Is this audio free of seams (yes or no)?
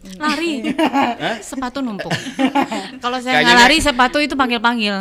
yes